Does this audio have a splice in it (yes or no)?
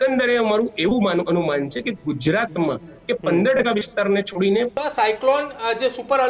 yes